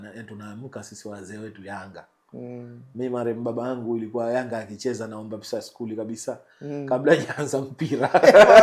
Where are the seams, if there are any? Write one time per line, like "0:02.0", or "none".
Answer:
none